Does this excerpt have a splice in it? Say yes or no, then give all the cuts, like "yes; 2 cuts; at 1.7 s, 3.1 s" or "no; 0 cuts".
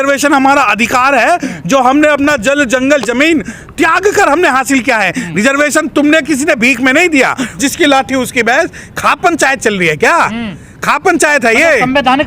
yes; 1 cut; at 7.6 s